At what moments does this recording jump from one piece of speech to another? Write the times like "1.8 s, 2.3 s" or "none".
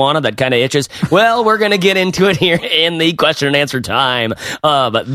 2.6 s